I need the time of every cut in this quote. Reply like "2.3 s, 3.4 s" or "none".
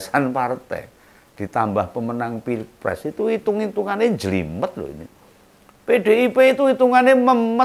none